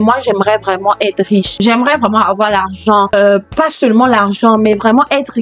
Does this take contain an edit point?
yes; 2 cuts; at 1.5 s, 3.1 s

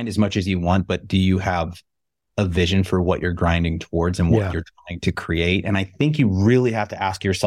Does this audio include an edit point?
no; 0 cuts

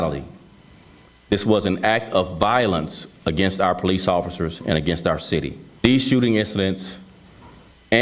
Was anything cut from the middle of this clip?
yes; 1 cut; at 5.6 s

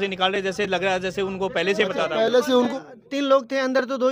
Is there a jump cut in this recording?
yes; 1 cut; at 2.7 s

